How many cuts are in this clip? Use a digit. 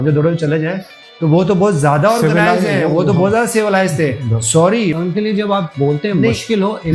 1